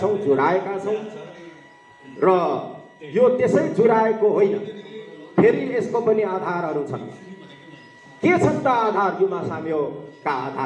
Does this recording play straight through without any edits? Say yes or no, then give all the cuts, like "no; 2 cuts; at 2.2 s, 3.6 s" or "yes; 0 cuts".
yes; 0 cuts